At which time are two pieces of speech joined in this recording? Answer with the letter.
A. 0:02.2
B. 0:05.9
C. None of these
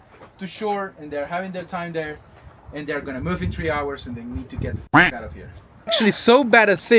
B